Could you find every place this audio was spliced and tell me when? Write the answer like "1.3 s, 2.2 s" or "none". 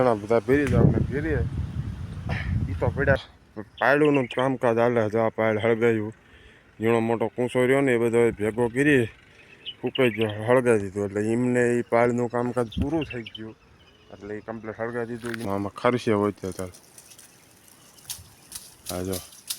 3.2 s, 15.4 s